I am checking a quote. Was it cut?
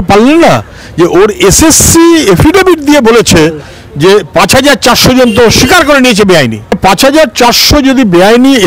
yes; 1 cut; at 6.8 s

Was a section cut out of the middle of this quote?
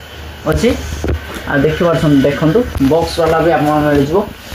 no; 0 cuts

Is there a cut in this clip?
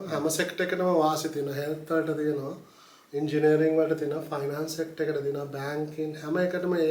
no; 0 cuts

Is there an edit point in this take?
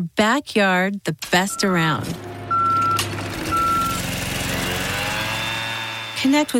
no; 0 cuts

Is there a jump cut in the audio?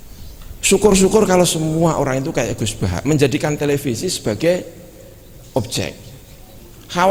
no; 0 cuts

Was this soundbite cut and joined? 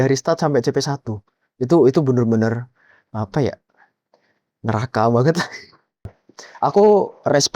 yes; 1 cut; at 6.0 s

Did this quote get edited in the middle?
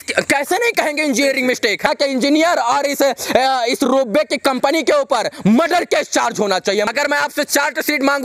yes; 2 cuts; at 1.9 s, 6.9 s

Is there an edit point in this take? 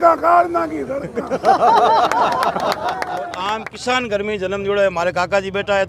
yes; 1 cut; at 3.4 s

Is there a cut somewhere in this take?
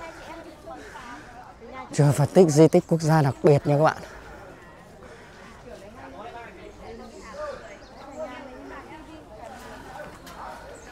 no; 0 cuts

